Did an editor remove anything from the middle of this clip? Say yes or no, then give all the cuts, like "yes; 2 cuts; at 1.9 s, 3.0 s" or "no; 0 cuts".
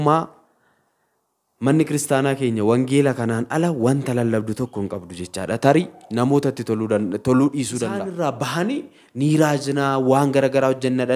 yes; 1 cut; at 7.9 s